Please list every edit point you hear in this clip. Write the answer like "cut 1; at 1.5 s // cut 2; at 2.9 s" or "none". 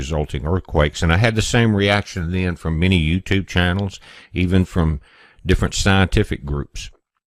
cut 1; at 1.2 s

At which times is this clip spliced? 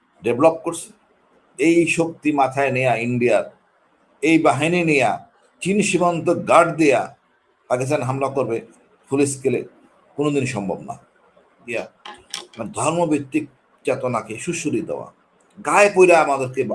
cut 1; at 11.7 s

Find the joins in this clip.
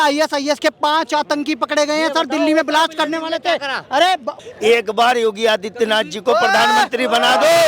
cut 1; at 4.3 s

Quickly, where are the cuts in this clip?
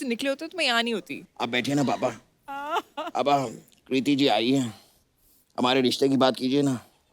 cut 1; at 1.2 s

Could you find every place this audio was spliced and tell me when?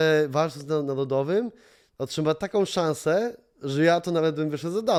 none

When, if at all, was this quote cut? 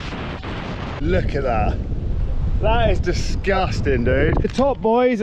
cut 1; at 1.0 s // cut 2; at 4.5 s

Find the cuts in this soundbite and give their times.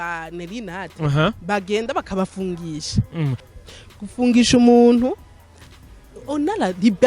cut 1; at 3.4 s

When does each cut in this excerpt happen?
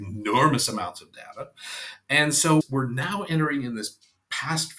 none

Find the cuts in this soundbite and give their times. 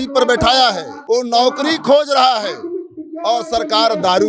cut 1; at 0.9 s

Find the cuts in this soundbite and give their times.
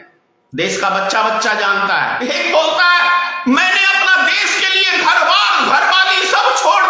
cut 1; at 2.2 s

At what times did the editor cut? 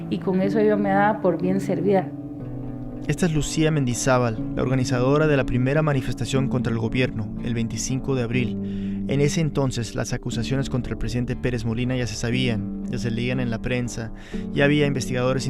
cut 1; at 4.0 s

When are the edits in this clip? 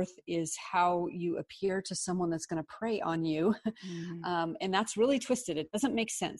none

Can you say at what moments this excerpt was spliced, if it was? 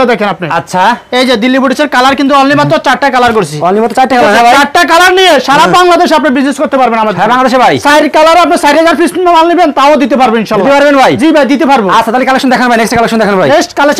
none

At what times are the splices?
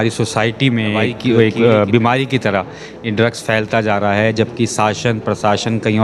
cut 1; at 1.1 s

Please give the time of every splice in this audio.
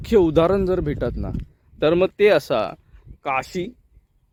none

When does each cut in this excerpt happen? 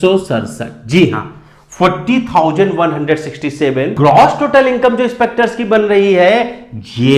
cut 1; at 3.9 s

